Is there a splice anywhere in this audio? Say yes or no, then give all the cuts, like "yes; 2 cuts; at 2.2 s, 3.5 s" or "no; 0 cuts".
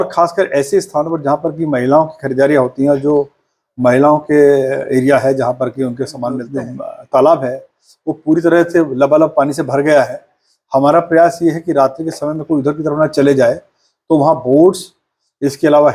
yes; 1 cut; at 6.4 s